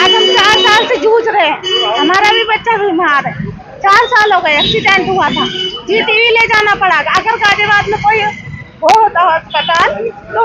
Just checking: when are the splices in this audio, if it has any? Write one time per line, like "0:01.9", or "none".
none